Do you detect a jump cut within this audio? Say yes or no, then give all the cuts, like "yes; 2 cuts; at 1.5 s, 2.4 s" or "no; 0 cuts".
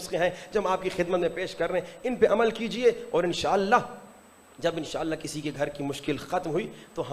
no; 0 cuts